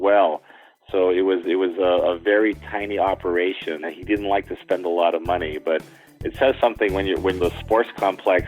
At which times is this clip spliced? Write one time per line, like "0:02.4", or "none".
0:03.9
0:07.4